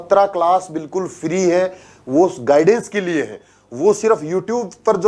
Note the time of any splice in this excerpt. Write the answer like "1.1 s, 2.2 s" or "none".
none